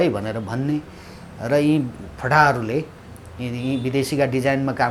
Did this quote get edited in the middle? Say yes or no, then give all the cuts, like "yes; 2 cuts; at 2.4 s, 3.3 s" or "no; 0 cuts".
no; 0 cuts